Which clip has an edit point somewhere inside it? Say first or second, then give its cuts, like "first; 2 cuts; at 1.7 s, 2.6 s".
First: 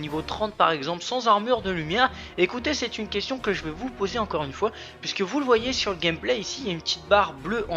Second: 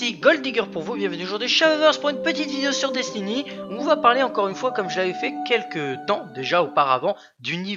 first; 1 cut; at 6.5 s